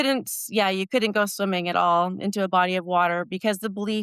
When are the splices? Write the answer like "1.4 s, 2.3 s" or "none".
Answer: none